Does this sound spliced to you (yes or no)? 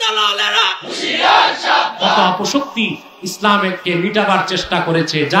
yes